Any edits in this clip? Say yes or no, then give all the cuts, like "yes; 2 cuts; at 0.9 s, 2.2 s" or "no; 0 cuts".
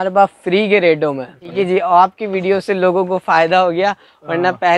yes; 1 cut; at 1.4 s